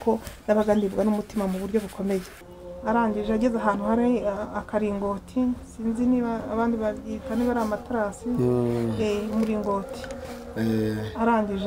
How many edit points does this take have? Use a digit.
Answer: 1